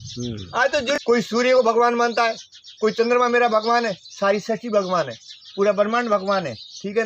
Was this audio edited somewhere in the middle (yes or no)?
yes